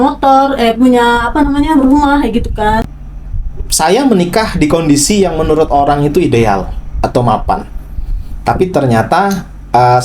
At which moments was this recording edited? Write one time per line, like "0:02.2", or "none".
0:03.0